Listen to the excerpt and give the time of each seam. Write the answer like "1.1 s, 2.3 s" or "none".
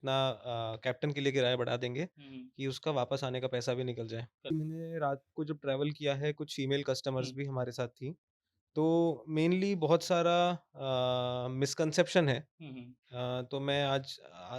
4.5 s